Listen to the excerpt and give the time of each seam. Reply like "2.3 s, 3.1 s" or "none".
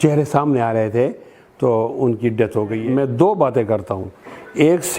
2.8 s

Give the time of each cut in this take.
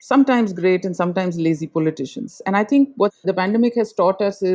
3.2 s

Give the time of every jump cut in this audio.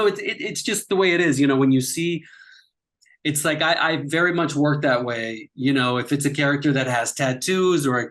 none

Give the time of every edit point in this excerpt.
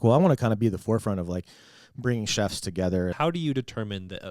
3.1 s

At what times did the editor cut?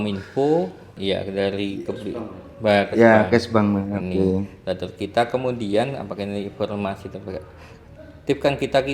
0.9 s

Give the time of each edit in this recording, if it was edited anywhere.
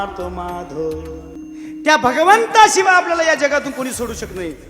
1.4 s

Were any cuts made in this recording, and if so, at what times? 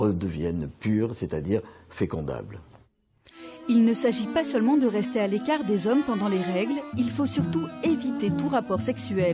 4.5 s

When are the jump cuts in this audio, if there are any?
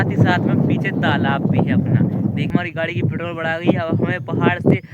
2.5 s

